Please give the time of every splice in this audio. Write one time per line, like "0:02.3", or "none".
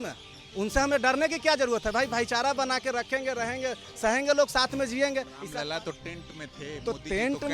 0:05.4